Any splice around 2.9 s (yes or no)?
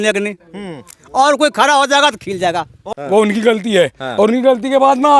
yes